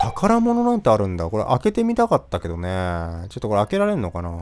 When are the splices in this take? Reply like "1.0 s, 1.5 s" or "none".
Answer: none